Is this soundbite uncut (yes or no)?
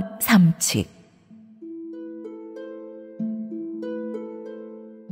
yes